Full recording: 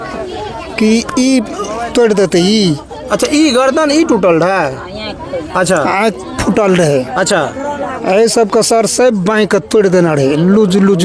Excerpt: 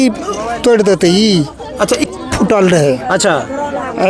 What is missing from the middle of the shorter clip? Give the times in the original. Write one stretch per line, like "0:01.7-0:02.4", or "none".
0:03.4-0:06.1